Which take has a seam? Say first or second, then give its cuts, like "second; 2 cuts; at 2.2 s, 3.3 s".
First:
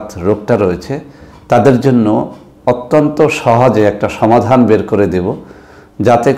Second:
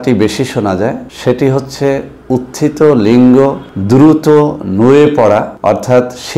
second; 3 cuts; at 1.1 s, 3.7 s, 5.5 s